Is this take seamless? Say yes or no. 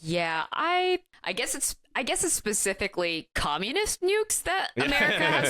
yes